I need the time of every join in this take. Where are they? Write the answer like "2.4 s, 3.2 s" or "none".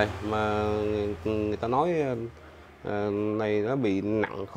none